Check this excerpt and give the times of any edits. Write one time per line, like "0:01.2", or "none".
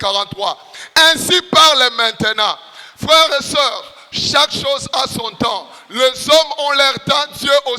none